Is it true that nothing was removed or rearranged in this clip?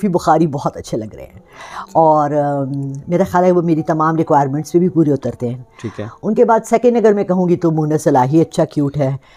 yes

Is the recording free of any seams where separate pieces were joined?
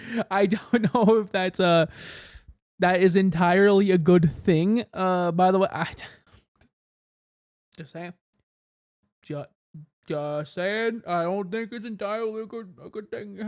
yes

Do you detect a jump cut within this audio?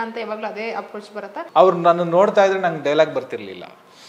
yes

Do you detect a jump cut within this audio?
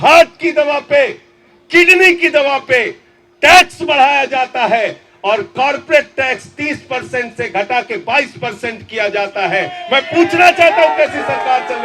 no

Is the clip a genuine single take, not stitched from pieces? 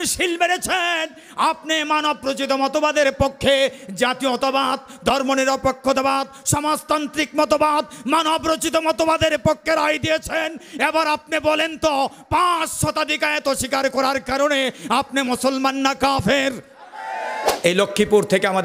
no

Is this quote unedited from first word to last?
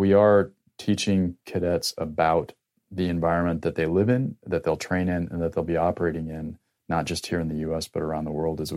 yes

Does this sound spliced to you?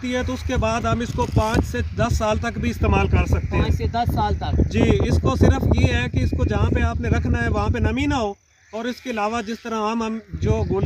no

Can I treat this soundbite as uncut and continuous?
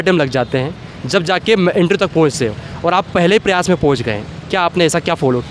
yes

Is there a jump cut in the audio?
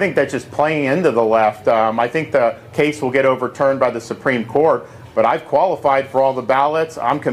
yes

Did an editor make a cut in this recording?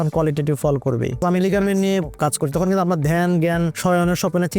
yes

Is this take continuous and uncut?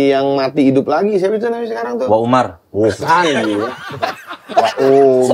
yes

